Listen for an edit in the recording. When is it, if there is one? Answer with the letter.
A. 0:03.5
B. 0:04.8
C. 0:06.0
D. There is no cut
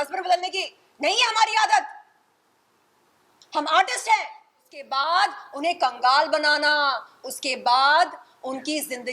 B